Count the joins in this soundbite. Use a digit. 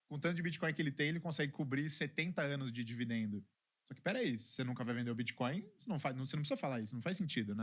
0